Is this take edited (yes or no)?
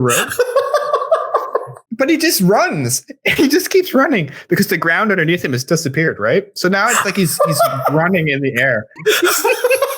yes